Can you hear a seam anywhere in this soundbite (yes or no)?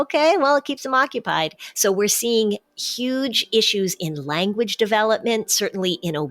yes